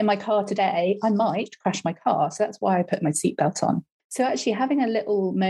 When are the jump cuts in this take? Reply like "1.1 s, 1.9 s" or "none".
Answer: 4.0 s